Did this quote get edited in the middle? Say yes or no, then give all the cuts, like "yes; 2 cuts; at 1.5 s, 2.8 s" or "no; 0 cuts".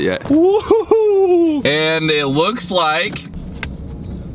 yes; 1 cut; at 1.6 s